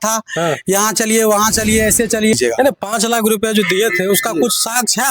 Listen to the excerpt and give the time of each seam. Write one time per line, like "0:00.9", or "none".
0:02.3